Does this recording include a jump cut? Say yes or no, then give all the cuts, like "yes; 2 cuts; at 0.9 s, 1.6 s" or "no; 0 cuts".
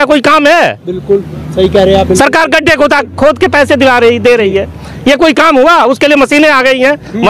no; 0 cuts